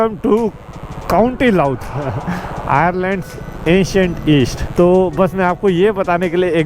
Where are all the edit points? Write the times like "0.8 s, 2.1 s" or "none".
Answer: 4.6 s